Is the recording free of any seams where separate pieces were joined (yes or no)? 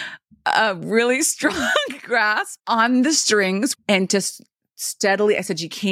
no